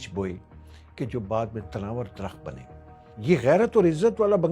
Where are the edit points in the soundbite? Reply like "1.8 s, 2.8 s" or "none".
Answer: 3.1 s